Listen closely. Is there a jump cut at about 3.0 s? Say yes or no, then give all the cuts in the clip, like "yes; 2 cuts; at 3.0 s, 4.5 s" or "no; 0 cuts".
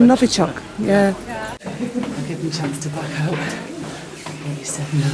no; 1 cut; at 1.6 s